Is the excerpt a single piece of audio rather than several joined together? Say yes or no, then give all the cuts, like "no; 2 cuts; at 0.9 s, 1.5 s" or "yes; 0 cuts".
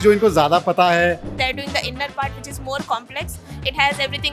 no; 1 cut; at 1.3 s